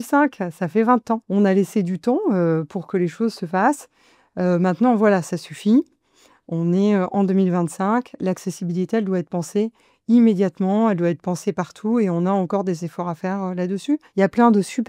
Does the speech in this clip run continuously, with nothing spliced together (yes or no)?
no